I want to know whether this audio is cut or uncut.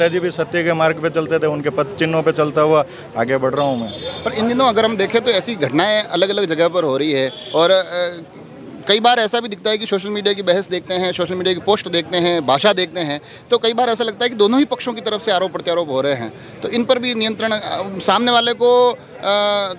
uncut